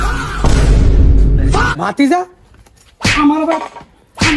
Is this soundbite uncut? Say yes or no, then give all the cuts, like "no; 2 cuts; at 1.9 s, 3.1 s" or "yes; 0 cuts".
no; 1 cut; at 1.7 s